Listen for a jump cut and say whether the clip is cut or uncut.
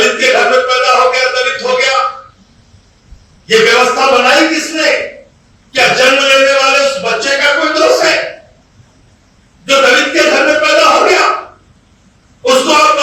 uncut